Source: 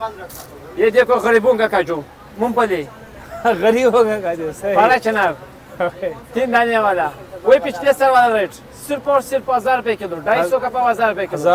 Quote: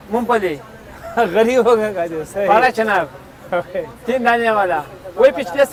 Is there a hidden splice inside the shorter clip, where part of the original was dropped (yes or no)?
no